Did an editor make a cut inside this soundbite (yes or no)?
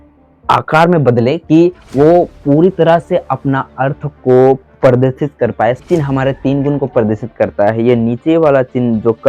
yes